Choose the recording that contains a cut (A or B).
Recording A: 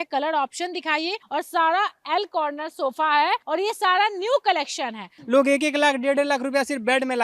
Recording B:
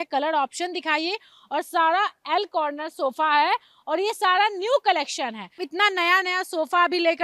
A